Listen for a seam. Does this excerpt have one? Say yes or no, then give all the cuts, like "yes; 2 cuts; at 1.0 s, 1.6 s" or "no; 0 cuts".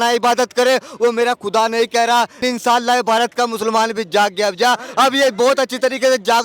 yes; 1 cut; at 2.4 s